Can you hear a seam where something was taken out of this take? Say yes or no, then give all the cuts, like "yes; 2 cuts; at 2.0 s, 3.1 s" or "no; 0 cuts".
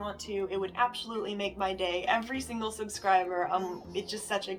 no; 0 cuts